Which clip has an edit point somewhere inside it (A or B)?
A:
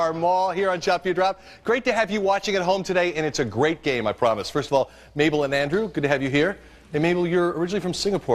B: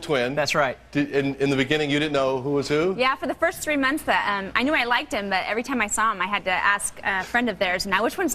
B